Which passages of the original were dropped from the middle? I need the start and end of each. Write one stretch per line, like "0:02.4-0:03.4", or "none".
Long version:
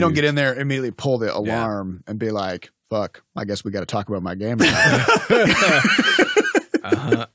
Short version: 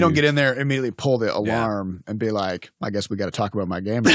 0:02.7-0:03.3